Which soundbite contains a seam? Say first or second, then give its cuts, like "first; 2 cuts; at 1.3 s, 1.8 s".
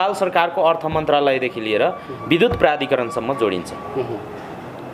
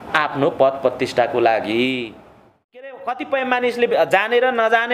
second; 1 cut; at 2.9 s